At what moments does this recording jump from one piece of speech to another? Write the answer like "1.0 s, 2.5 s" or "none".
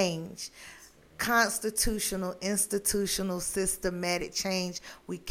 none